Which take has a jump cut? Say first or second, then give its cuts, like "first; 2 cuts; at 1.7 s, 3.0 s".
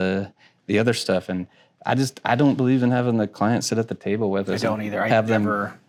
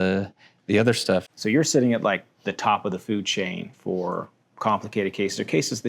second; 1 cut; at 1.3 s